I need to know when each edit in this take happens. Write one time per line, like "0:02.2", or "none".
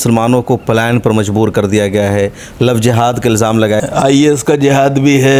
0:03.8